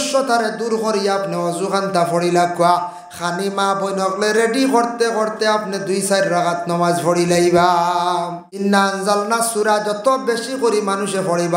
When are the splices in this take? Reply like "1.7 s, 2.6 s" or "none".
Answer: 8.6 s